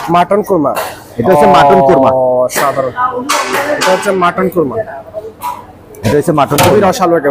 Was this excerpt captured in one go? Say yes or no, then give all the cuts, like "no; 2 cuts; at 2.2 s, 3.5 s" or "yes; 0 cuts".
yes; 0 cuts